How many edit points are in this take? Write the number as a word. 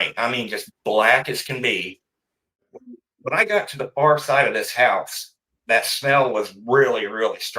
one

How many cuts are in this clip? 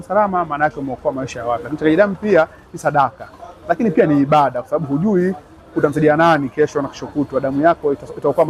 zero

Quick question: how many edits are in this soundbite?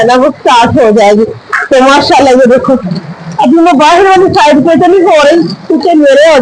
zero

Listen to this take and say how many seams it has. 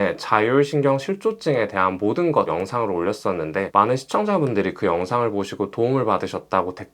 one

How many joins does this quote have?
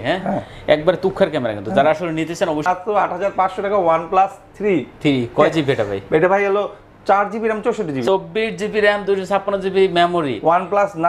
two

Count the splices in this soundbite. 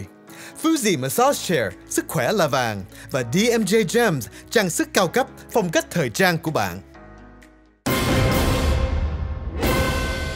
one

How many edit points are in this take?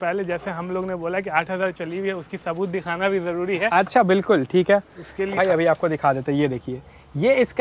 one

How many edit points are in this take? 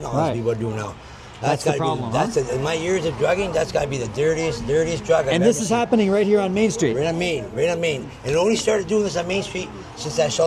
zero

